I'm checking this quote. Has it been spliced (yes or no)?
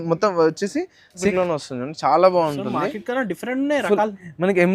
yes